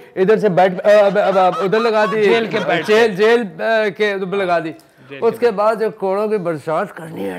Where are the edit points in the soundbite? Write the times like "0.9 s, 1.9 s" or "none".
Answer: none

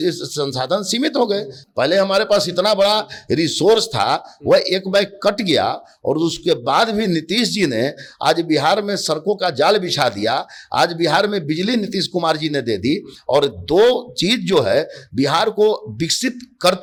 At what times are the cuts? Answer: none

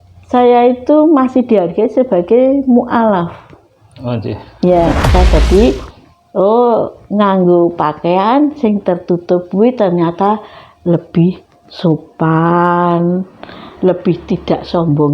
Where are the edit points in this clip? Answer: 5.0 s

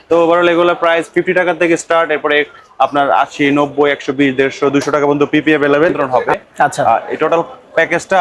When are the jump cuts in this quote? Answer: 6.0 s

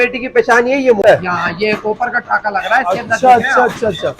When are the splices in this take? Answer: 1.0 s

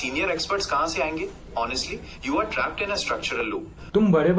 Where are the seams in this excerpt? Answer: 3.5 s

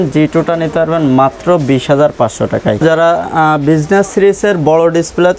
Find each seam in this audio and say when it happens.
2.8 s

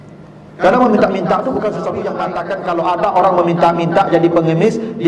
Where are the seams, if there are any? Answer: 2.3 s

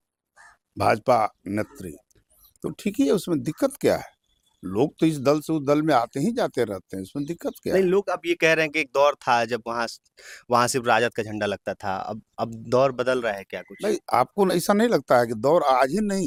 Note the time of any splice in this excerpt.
none

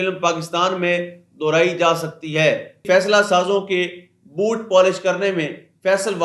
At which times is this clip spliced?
2.8 s

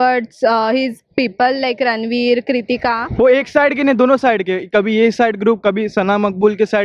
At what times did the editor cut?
3.0 s

